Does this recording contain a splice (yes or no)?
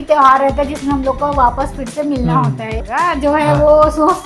yes